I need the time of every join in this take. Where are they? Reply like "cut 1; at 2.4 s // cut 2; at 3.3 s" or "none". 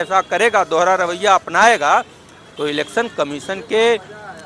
none